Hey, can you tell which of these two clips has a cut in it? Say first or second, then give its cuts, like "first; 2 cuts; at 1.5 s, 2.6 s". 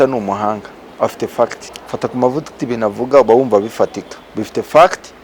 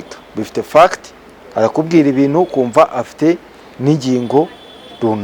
first; 1 cut; at 1.7 s